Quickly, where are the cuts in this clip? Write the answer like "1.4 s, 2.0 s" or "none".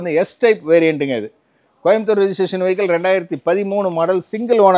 none

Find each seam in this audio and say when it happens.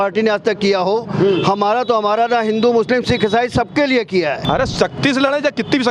4.4 s

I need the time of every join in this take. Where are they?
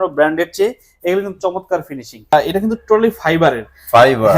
2.3 s

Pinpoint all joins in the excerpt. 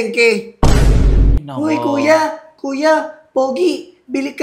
1.4 s

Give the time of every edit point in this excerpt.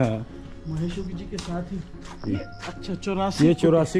none

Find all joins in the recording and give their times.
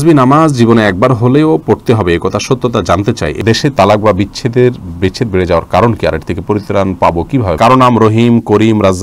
3.4 s, 7.5 s

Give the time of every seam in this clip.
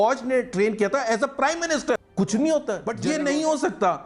2.0 s, 2.9 s

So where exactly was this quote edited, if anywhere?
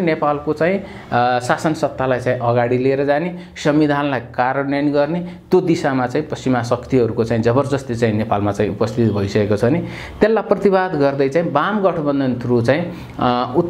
none

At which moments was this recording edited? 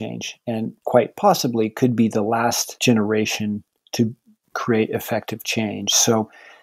2.7 s

